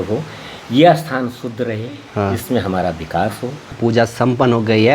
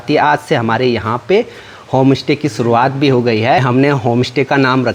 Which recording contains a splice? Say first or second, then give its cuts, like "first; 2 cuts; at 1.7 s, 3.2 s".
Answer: first; 1 cut; at 3.8 s